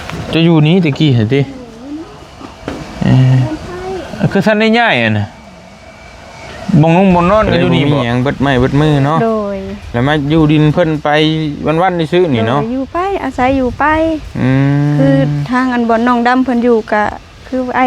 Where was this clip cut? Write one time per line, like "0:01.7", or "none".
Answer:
0:07.7